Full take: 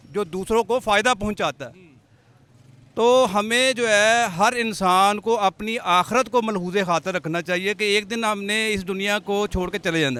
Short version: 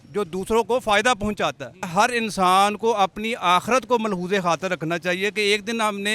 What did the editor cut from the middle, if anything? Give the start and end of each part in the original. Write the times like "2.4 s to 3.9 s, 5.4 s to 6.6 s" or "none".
1.9 s to 4.3 s